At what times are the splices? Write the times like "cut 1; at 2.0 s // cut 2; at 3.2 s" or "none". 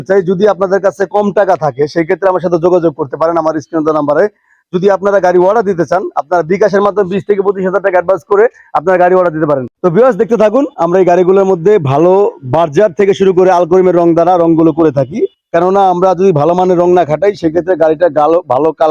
cut 1; at 9.7 s